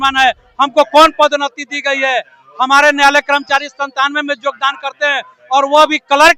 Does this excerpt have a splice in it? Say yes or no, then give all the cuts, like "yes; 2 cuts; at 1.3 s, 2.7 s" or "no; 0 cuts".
no; 0 cuts